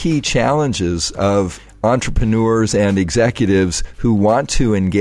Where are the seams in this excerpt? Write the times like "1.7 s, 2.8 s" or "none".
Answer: 1.6 s